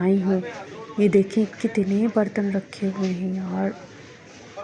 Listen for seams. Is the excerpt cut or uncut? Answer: uncut